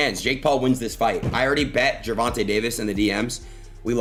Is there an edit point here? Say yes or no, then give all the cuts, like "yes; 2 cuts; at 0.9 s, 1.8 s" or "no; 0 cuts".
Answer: no; 0 cuts